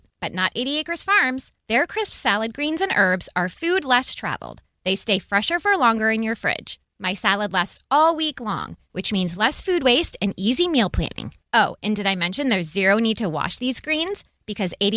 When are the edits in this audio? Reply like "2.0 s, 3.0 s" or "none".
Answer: none